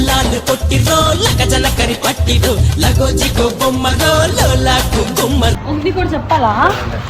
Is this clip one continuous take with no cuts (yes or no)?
no